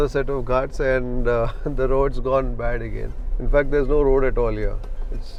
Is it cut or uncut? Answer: uncut